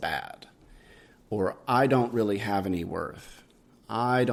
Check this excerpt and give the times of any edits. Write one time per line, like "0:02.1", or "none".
none

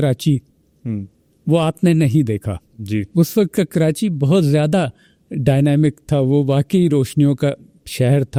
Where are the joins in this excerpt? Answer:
none

